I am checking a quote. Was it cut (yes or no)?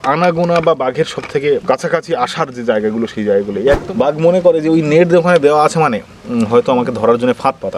yes